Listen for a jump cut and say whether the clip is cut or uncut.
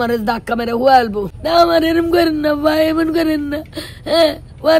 cut